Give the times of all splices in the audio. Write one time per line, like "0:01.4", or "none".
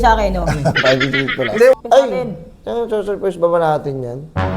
0:01.7